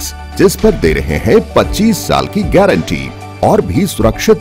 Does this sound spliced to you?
no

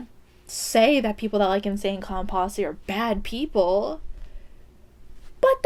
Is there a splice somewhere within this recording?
no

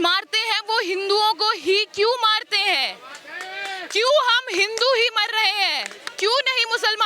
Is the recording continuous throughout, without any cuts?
no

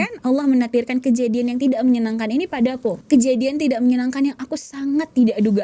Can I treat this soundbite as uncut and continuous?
no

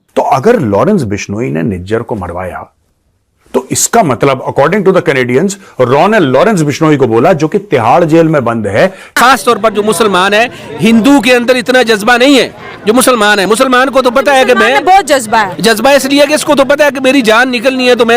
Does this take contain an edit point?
yes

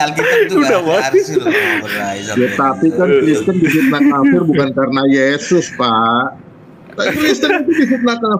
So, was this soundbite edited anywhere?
no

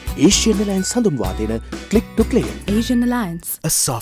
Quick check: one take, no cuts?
no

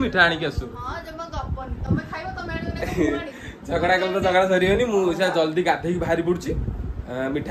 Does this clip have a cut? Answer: no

